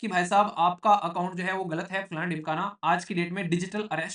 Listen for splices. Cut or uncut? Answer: uncut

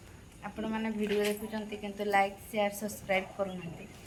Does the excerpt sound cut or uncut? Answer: uncut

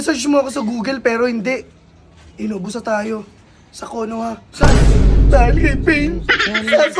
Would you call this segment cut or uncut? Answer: uncut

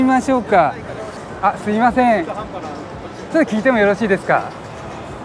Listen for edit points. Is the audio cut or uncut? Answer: cut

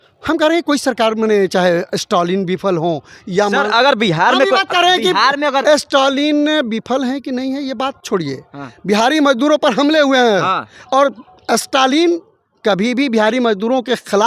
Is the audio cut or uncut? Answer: uncut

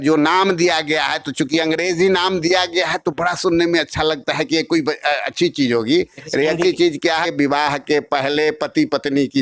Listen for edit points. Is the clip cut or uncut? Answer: cut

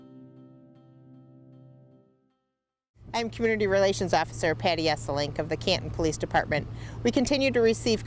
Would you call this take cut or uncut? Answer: cut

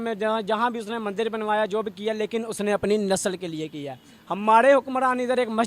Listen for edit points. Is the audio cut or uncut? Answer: uncut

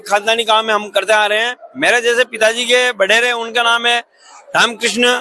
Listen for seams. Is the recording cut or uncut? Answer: uncut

